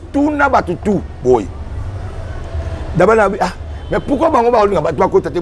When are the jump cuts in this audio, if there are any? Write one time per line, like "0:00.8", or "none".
none

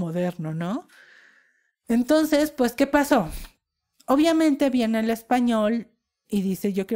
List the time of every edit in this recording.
none

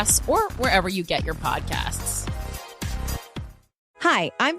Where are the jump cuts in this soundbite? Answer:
0:01.6

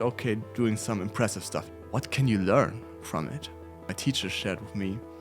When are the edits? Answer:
0:01.7
0:03.8

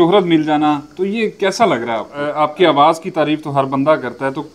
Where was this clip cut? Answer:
0:02.2

